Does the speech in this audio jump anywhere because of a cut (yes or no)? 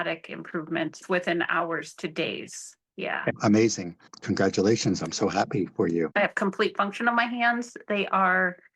yes